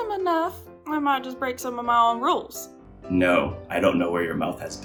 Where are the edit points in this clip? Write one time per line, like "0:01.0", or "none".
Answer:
none